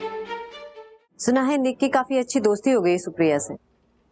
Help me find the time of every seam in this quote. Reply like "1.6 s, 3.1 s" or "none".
1.1 s